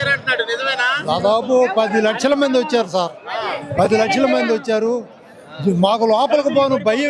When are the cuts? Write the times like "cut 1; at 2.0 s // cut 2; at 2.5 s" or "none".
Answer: none